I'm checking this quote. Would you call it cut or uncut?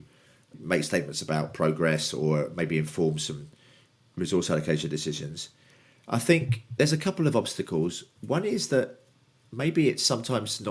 uncut